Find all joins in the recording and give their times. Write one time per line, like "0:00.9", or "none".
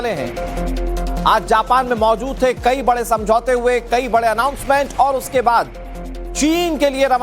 0:01.4

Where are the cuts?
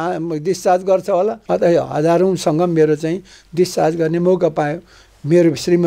0:01.4

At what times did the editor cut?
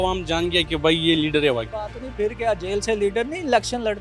0:01.7

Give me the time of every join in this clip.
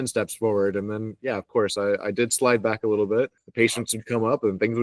0:03.4

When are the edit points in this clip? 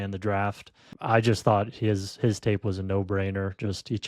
0:00.9

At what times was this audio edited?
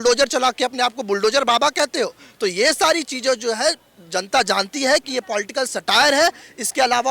none

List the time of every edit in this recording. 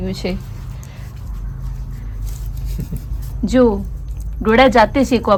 none

